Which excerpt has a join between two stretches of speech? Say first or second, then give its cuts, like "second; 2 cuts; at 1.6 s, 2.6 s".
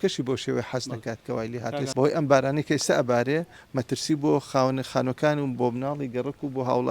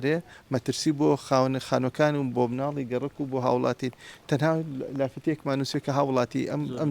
first; 1 cut; at 1.8 s